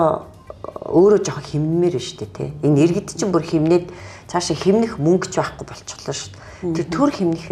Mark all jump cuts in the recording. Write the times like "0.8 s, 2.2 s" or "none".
none